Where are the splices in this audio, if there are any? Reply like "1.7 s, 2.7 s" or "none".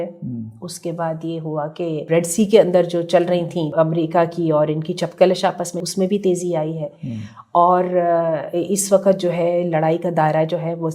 2.0 s, 3.7 s, 5.8 s